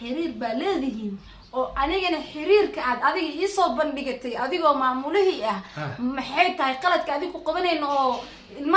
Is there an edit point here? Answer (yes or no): no